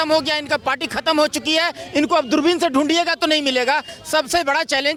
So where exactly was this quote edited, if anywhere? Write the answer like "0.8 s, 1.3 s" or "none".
none

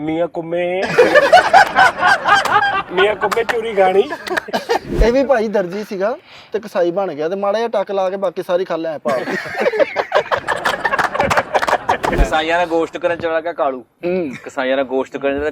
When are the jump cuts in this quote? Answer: 4.9 s, 12.2 s

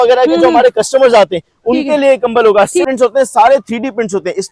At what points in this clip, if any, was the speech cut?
2.9 s

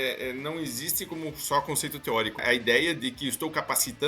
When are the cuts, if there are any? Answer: 2.4 s

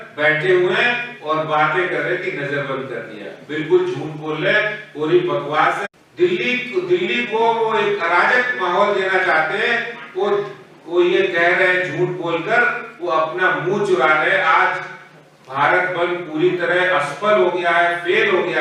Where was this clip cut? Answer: 5.8 s

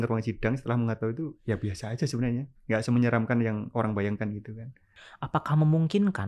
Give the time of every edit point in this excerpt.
5.0 s

